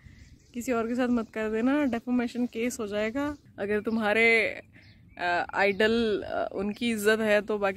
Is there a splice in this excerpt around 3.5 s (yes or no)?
yes